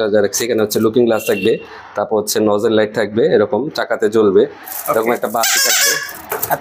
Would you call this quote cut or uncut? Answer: uncut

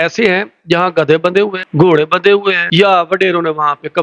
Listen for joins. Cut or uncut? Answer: cut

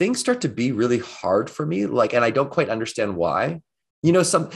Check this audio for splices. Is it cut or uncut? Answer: uncut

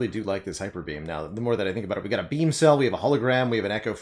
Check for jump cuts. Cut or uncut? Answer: uncut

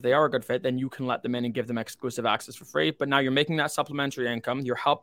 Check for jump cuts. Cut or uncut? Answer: uncut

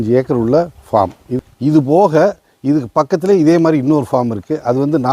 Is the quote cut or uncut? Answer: cut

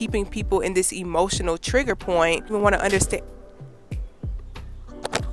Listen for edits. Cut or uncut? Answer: cut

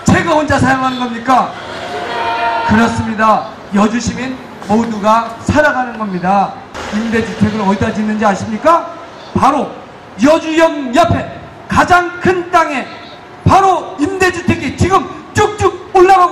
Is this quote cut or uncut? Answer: cut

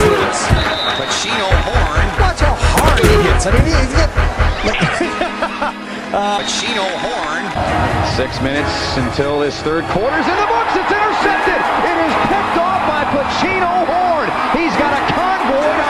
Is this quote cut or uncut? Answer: uncut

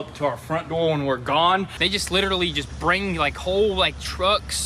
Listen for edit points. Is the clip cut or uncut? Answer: cut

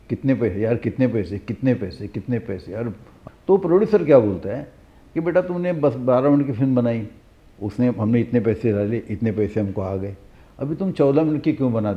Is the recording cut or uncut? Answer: cut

